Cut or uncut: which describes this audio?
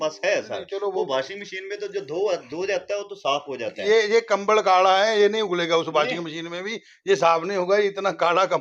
uncut